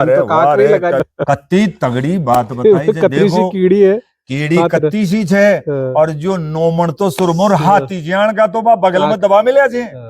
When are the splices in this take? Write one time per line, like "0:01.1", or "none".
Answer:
0:01.0